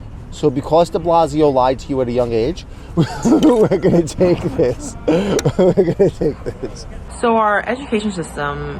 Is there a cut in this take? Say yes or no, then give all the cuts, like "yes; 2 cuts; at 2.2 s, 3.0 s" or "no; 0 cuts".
no; 0 cuts